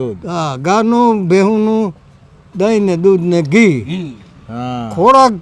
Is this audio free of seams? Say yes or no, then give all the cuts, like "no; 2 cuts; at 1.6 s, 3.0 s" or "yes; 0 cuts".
yes; 0 cuts